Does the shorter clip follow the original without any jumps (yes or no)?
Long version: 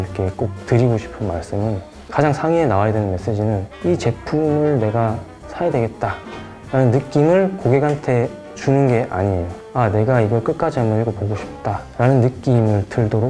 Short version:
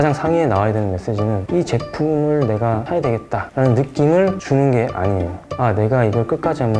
no